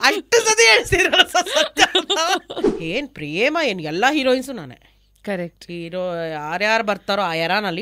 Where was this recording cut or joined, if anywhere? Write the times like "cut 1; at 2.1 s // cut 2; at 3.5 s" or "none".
cut 1; at 2.7 s